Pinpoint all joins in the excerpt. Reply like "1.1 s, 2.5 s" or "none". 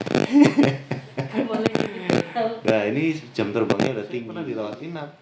4.2 s